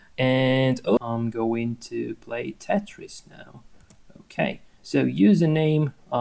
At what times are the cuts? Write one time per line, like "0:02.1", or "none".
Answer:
0:01.0